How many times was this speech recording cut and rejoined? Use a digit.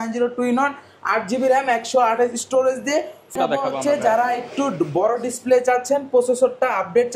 1